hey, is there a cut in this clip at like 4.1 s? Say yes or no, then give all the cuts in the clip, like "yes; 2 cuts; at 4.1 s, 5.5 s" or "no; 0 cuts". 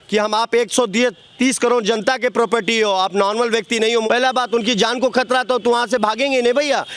yes; 1 cut; at 4.1 s